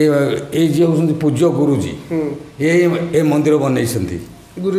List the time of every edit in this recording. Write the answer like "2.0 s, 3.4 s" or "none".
none

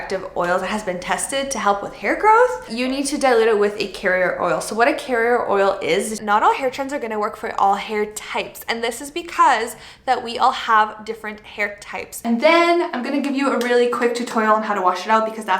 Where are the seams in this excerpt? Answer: 2.7 s, 6.2 s, 12.1 s

